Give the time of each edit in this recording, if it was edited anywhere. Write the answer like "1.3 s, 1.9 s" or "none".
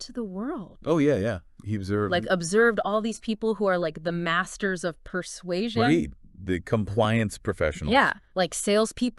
8.2 s